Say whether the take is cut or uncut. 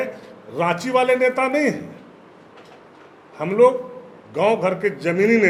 uncut